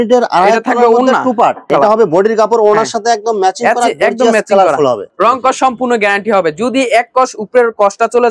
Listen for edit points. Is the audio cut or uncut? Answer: cut